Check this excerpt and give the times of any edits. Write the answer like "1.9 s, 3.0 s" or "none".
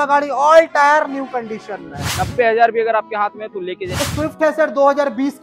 2.0 s, 3.9 s